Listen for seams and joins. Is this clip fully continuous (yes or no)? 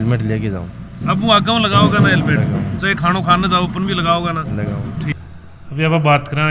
yes